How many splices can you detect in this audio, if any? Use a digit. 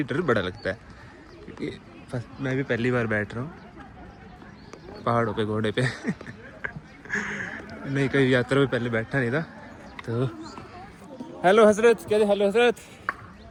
0